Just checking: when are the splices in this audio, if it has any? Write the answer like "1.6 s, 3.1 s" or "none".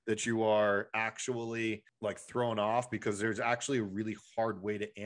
1.9 s